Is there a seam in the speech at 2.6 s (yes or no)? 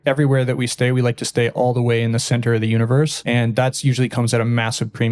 no